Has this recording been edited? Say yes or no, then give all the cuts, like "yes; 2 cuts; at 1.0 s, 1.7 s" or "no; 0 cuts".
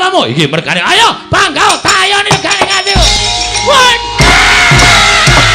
yes; 1 cut; at 3.2 s